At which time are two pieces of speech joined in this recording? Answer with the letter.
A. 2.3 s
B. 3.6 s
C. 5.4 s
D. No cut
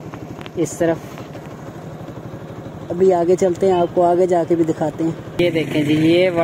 C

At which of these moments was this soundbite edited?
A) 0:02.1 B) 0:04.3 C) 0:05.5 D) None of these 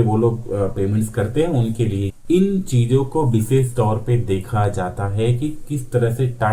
A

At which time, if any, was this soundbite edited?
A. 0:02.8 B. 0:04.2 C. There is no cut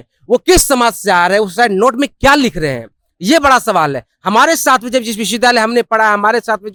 C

